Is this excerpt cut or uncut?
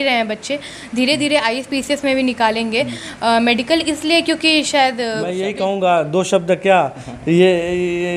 cut